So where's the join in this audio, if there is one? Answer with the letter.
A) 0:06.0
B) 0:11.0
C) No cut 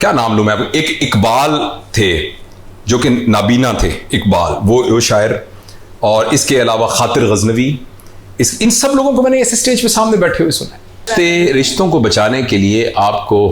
B